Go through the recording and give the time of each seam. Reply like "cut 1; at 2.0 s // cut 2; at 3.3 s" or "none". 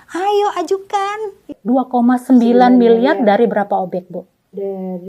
cut 1; at 1.5 s